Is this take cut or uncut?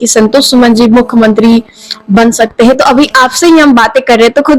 uncut